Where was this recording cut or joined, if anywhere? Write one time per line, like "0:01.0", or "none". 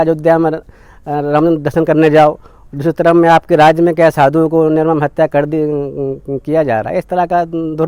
none

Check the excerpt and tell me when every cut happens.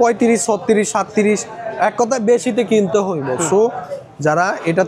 none

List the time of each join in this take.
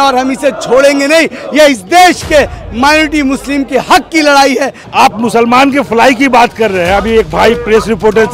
0:04.8

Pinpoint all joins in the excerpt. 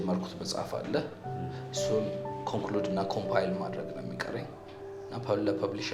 none

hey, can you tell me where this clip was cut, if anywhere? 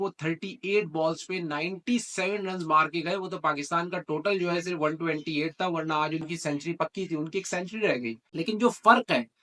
0:08.2

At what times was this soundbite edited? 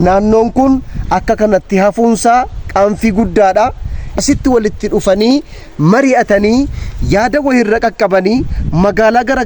0:04.1

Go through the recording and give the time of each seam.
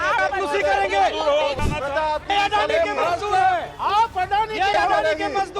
0:01.6

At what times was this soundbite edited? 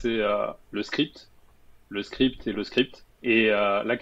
0:03.1

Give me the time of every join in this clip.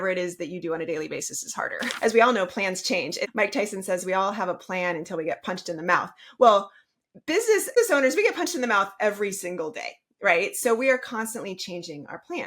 0:01.9
0:03.2
0:07.8

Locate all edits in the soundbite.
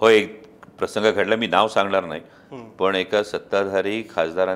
none

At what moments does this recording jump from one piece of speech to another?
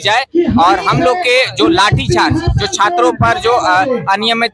none

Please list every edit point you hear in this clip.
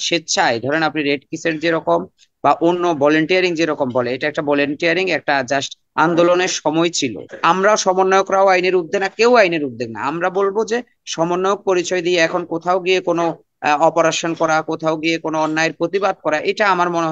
0:07.3

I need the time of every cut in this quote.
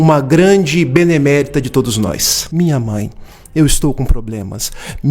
0:02.4

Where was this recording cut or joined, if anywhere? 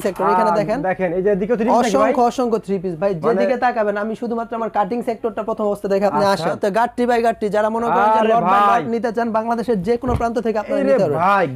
0:06.6

